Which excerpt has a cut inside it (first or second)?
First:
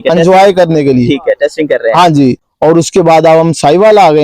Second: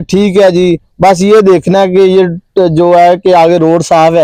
first